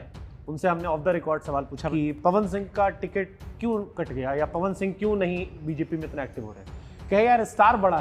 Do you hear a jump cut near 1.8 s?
yes; 1 cut; at 1.8 s

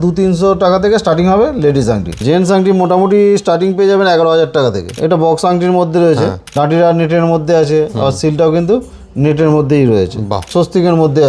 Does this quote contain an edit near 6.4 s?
yes; 4 cuts; at 2.2 s, 4.9 s, 6.4 s, 10.4 s

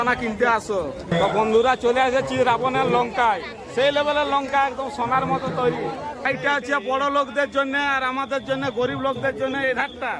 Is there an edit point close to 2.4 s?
no; 2 cuts; at 1.1 s, 6.3 s

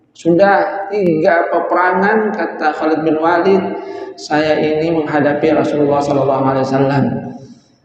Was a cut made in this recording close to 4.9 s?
no; 1 cut; at 1.0 s

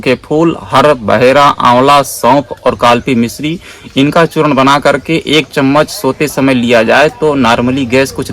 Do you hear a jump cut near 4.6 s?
no; 0 cuts

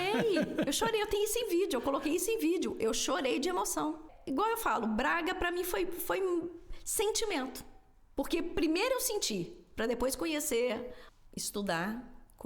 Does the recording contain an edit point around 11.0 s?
yes; 2 cuts; at 4.1 s, 11.0 s

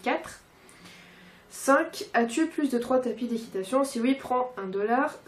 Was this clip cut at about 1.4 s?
no; 1 cut; at 2.6 s

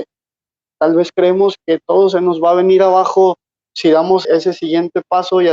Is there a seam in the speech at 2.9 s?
no; 2 cuts; at 1.6 s, 4.2 s

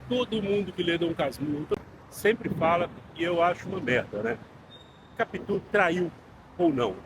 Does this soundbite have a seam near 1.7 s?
yes; 1 cut; at 1.7 s

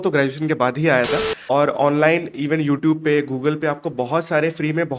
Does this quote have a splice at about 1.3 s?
yes; 1 cut; at 1.3 s

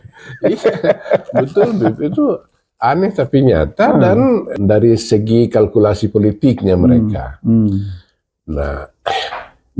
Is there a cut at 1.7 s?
no; 1 cut; at 4.5 s

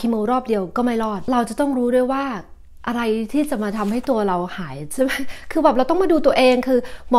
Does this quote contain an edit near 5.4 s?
no; 1 cut; at 1.2 s

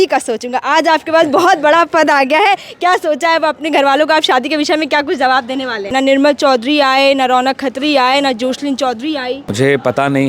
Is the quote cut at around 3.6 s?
no; 2 cuts; at 5.9 s, 9.5 s

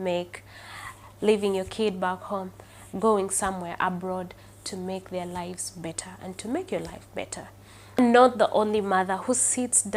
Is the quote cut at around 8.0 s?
yes; 1 cut; at 8.0 s

